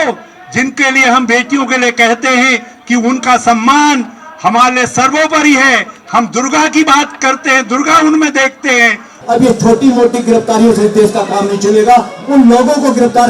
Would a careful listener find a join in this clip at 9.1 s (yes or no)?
yes